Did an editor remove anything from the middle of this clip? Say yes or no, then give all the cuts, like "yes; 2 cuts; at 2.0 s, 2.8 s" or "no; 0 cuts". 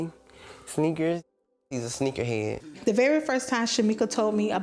yes; 1 cut; at 2.6 s